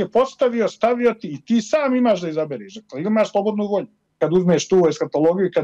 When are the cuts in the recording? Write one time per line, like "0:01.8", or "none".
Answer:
0:04.2